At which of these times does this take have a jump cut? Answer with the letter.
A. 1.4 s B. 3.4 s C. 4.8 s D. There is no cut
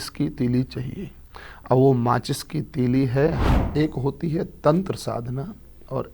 B